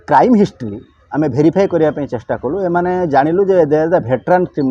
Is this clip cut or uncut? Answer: uncut